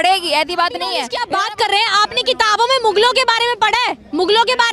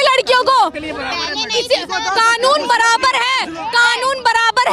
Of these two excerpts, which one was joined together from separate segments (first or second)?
first